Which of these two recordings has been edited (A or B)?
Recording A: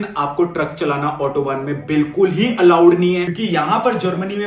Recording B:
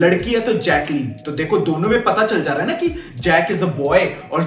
A